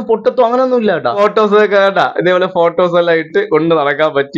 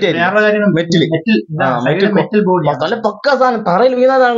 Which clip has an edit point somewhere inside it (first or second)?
first